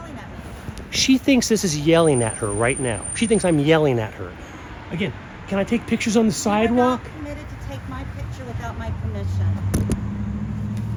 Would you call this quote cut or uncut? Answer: uncut